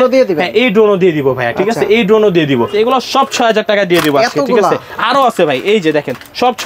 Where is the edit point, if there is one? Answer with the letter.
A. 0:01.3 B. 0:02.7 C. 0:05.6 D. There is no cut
B